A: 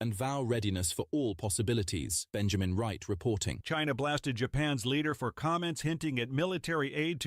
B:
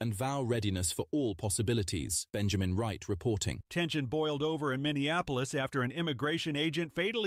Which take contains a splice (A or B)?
A